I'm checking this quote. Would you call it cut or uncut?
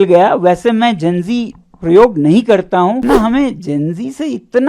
cut